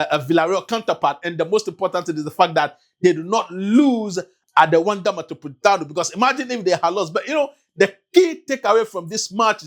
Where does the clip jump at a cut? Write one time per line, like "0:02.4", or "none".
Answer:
none